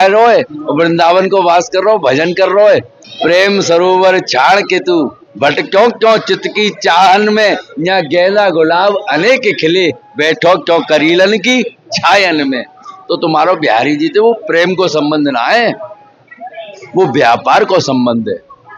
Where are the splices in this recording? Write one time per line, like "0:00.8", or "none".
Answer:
0:03.0
0:13.0